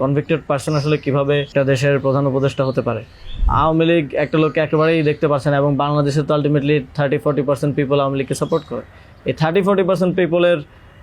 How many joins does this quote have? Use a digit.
2